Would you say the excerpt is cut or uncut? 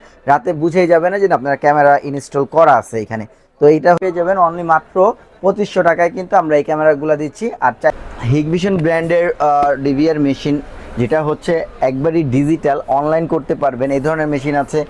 cut